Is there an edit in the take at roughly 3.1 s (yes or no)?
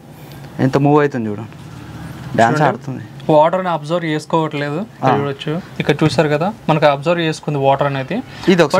no